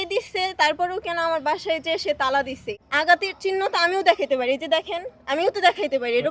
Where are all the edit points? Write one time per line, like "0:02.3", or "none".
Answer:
0:02.7